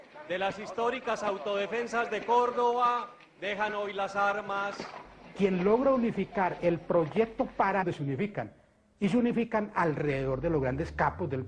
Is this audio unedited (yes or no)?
yes